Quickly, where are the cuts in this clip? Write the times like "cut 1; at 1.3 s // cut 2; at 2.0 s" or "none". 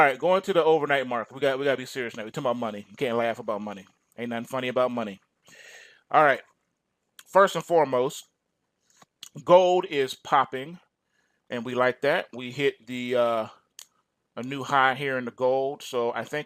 cut 1; at 2.9 s